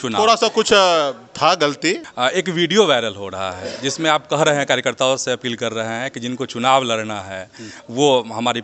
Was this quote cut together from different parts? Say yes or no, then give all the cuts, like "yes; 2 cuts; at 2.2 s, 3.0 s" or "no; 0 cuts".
yes; 1 cut; at 2.0 s